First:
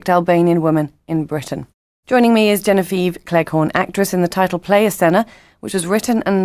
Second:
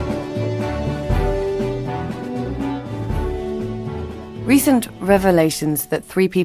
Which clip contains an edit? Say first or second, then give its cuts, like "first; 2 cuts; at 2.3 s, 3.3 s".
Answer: first; 1 cut; at 1.3 s